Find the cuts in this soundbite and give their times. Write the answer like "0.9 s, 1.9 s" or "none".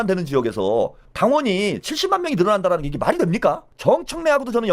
1.0 s, 3.7 s